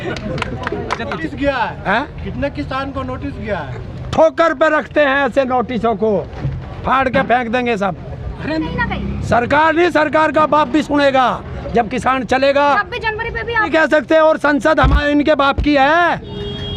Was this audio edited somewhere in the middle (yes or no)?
yes